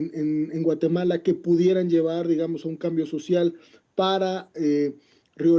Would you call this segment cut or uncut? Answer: cut